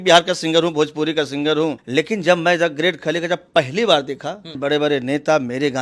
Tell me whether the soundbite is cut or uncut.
cut